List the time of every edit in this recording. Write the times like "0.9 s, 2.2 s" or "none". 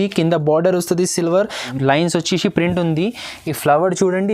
1.7 s